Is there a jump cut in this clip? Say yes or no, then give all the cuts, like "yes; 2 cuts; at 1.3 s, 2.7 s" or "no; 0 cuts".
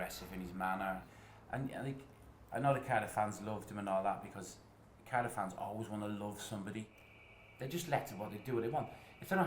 yes; 2 cuts; at 1.1 s, 7.0 s